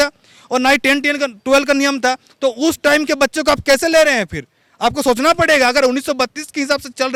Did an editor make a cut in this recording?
no; 0 cuts

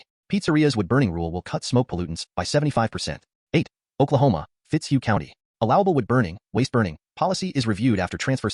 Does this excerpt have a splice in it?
yes; 1 cut; at 3.3 s

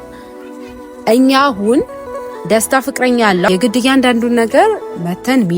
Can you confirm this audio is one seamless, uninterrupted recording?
no; 1 cut; at 3.5 s

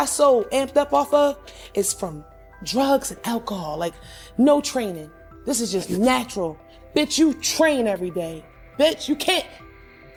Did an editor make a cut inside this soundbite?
no; 0 cuts

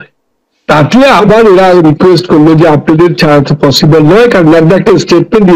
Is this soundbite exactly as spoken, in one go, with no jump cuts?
yes; 0 cuts

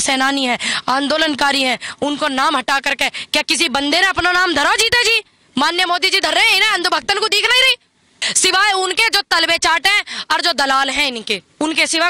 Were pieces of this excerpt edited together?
yes; 1 cut; at 8.2 s

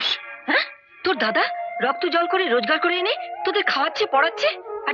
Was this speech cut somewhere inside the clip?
no; 0 cuts

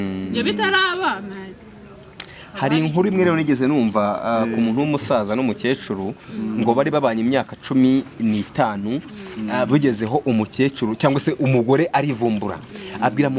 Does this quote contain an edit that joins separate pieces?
no; 0 cuts

